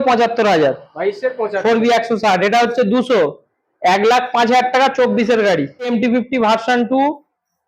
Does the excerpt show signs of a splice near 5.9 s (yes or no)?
yes